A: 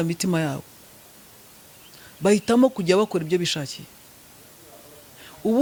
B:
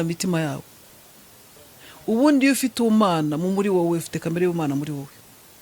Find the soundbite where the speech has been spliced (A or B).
B